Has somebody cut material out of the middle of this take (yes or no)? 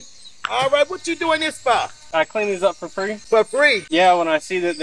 yes